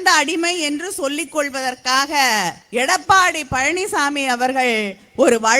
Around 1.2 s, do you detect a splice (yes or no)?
no